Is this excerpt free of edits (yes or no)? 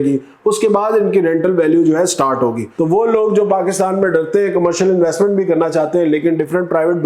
no